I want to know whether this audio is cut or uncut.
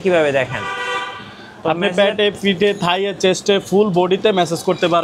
uncut